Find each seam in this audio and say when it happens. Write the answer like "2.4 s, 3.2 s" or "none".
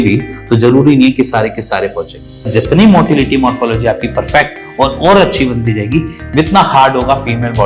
2.5 s

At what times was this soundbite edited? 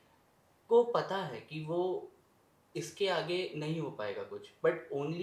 none

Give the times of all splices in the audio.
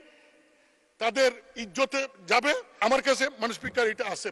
2.8 s

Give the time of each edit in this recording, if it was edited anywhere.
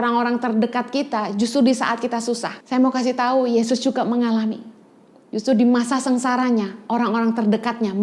2.5 s

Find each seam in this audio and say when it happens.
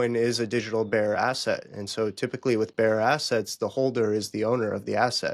none

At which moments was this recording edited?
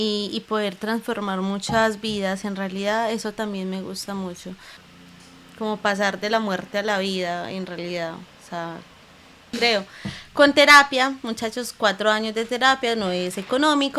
4.7 s, 9.5 s

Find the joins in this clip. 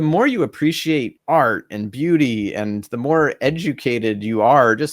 1.1 s

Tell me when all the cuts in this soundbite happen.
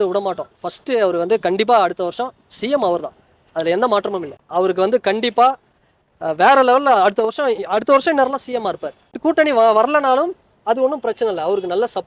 4.4 s, 9.1 s

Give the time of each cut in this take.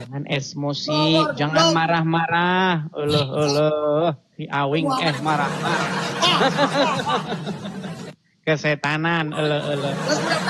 none

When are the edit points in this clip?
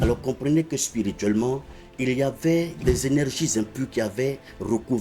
2.8 s

